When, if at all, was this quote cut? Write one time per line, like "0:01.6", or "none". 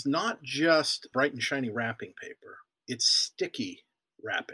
0:01.1
0:02.7

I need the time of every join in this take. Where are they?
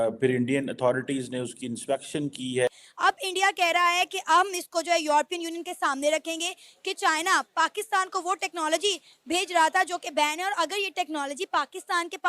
0:02.7

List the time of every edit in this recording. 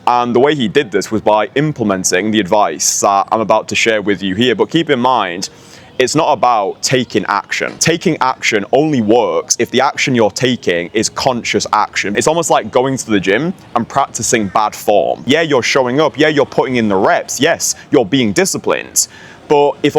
0:07.7
0:12.1
0:15.2

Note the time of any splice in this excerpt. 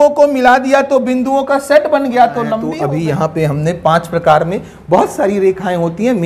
0:02.7

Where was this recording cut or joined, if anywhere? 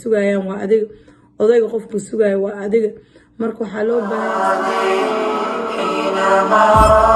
0:04.2

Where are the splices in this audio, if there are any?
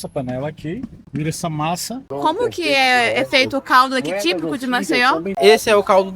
0:01.0
0:02.1
0:05.4

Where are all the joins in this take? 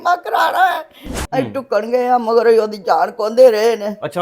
0:01.2

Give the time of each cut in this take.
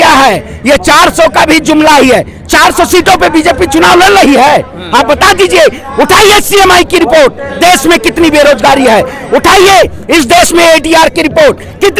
none

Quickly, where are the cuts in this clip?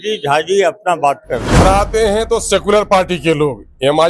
0:01.6

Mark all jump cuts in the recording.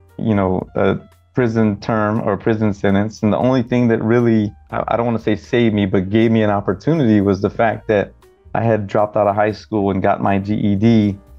0:04.6

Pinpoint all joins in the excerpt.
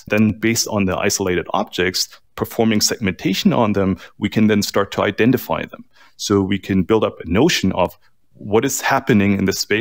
none

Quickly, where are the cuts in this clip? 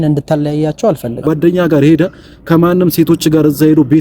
0:01.2

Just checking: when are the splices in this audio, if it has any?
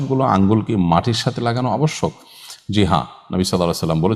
none

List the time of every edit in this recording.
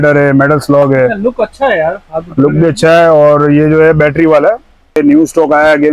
0:05.0

